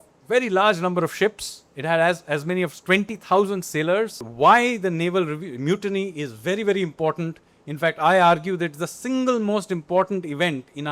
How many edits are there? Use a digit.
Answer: 1